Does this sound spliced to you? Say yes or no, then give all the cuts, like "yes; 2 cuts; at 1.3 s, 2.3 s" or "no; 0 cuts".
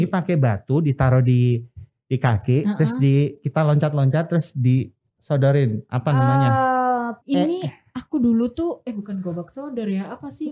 yes; 1 cut; at 7.2 s